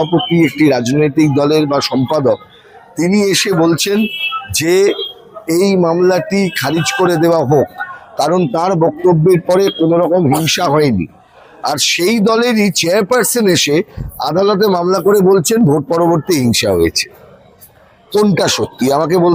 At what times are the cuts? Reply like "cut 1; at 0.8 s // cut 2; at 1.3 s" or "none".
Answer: none